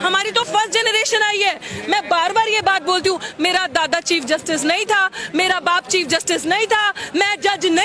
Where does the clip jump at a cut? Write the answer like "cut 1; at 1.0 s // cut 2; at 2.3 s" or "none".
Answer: none